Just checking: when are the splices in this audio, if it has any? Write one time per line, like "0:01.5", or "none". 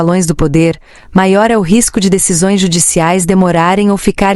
none